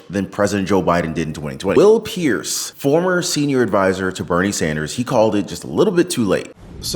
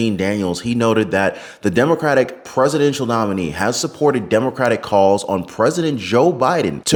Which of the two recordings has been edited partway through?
first; 1 cut; at 1.8 s

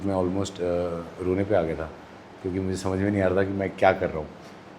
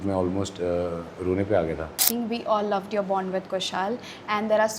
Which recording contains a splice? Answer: second; 1 cut; at 2.1 s

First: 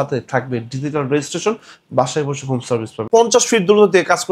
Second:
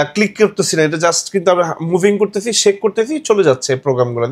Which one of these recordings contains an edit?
first; 1 cut; at 3.0 s

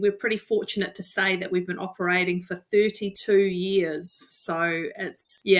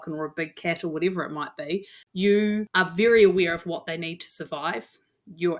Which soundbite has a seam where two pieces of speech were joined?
second; 2 cuts; at 2.0 s, 2.7 s

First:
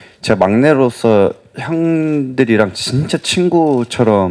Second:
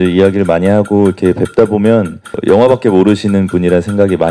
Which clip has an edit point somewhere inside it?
second; 1 cut; at 2.3 s

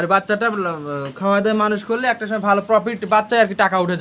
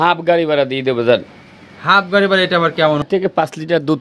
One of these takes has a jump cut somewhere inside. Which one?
second; 1 cut; at 3.0 s

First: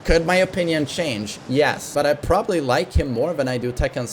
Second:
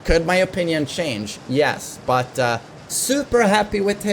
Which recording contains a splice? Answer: first; 1 cut; at 1.9 s

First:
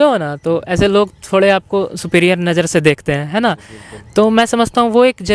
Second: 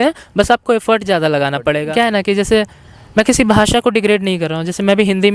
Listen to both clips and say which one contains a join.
second; 1 cut; at 1.8 s

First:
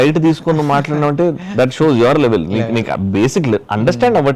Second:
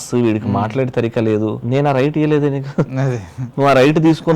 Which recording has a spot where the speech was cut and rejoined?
second; 1 cut; at 1.6 s

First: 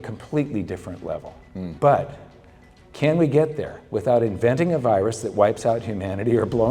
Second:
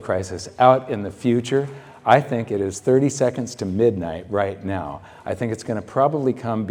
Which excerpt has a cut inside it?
first; 1 cut; at 1.7 s

